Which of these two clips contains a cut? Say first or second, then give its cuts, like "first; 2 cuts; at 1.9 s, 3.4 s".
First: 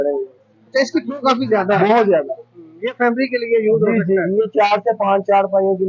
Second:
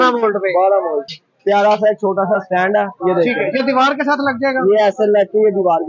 second; 1 cut; at 1.2 s